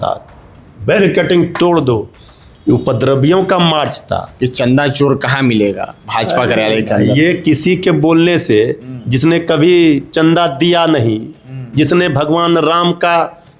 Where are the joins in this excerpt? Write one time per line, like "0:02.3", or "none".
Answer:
0:04.3